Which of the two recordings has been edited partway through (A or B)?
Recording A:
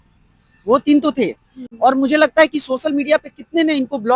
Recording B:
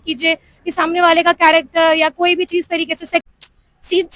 B